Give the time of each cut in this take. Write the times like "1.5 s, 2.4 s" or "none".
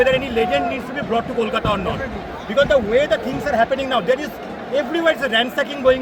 none